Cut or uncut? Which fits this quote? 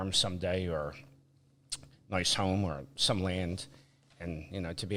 uncut